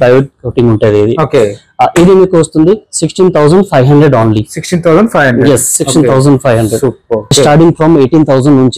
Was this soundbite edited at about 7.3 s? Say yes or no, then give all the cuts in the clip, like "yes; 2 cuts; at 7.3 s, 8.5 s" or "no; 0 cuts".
yes; 1 cut; at 7.3 s